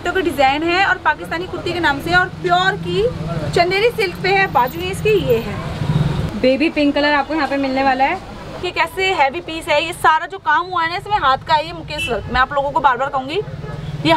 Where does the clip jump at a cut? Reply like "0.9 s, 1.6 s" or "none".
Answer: 6.2 s, 8.5 s